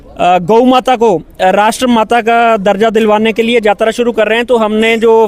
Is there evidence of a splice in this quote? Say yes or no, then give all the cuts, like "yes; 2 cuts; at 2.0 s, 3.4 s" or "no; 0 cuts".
no; 0 cuts